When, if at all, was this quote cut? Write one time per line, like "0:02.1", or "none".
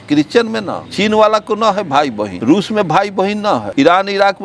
0:02.3
0:03.7